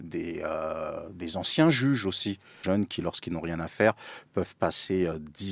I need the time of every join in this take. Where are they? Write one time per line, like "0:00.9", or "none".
0:02.5